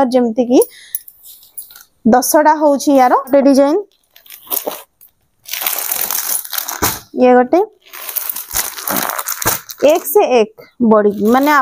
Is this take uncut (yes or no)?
no